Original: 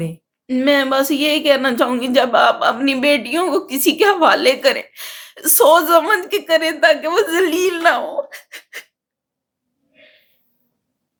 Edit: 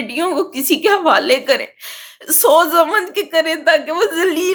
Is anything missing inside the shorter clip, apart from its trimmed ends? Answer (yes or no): no